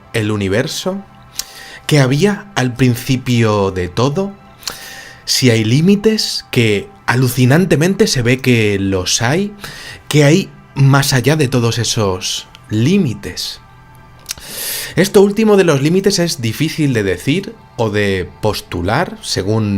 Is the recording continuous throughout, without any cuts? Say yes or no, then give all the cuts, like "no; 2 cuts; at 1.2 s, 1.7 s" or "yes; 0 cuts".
no; 1 cut; at 16.4 s